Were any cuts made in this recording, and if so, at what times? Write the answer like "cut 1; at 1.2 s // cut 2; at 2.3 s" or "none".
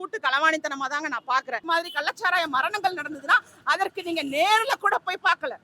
cut 1; at 1.6 s